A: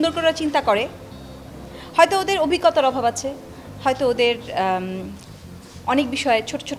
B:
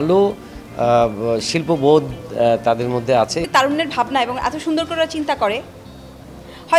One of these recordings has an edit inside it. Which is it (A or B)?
B